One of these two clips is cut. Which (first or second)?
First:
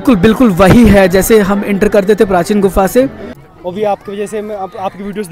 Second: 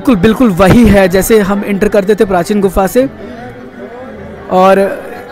first